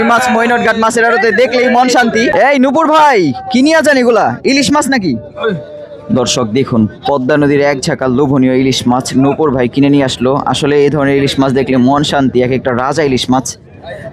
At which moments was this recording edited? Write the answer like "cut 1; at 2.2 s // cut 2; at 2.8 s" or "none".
cut 1; at 2.3 s